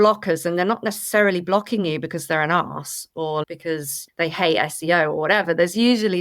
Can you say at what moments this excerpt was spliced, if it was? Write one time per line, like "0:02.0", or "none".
0:03.4